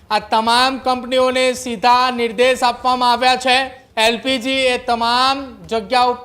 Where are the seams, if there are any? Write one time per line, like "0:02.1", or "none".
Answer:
0:03.8